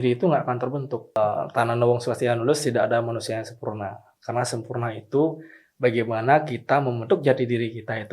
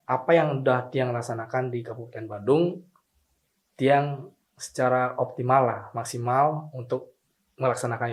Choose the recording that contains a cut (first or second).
first